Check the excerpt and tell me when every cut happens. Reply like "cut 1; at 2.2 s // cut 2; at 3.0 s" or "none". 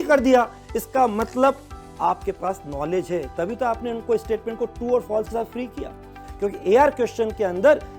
cut 1; at 6.2 s